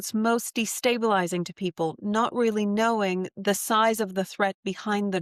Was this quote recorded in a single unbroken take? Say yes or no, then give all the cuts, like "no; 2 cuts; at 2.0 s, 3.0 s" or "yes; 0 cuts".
yes; 0 cuts